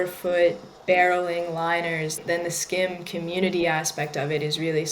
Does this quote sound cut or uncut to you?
cut